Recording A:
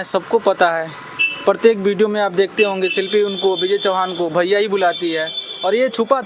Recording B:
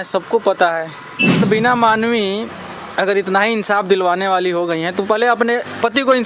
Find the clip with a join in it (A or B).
B